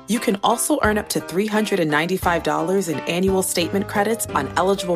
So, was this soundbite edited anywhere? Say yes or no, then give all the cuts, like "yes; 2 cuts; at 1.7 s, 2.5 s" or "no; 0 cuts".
no; 0 cuts